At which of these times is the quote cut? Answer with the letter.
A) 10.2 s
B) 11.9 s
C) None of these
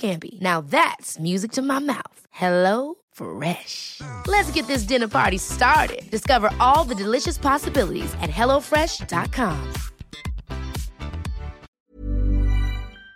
B